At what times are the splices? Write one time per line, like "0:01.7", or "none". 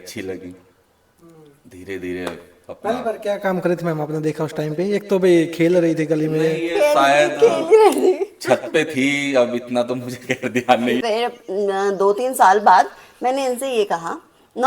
0:11.0

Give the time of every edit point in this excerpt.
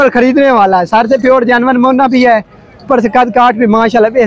none

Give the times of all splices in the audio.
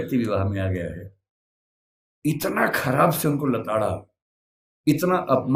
none

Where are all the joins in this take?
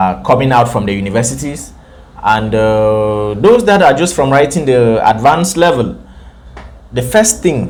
none

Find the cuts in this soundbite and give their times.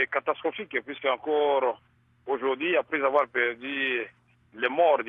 none

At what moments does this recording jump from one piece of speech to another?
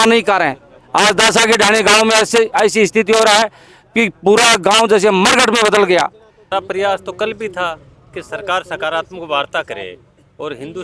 none

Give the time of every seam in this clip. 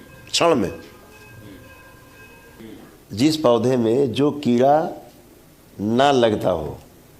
0:02.5

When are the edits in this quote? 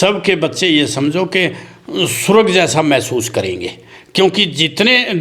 none

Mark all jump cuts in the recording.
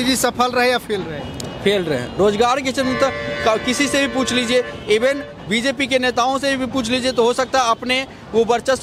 none

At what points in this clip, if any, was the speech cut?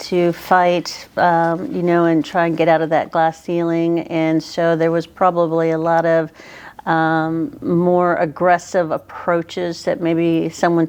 none

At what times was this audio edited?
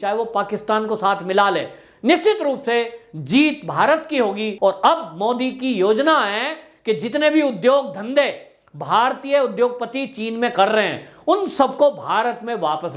0:04.5

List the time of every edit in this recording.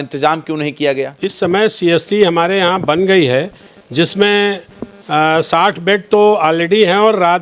0:01.2

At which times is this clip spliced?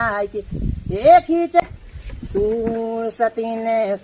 0:01.6

